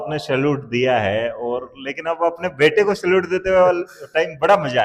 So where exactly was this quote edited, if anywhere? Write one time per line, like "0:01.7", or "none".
none